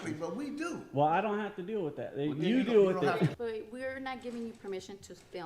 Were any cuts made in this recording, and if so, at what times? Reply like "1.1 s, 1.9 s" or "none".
3.3 s